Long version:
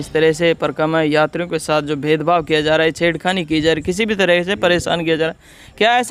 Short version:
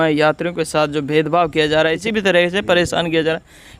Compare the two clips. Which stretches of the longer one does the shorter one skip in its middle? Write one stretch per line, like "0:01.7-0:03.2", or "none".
0:03.0-0:04.0